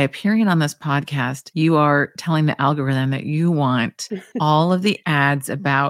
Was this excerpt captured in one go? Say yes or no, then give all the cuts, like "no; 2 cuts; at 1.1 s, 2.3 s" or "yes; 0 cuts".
yes; 0 cuts